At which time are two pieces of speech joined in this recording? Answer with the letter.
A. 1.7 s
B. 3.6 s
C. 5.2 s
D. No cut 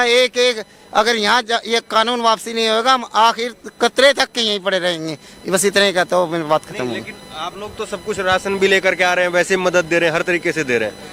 D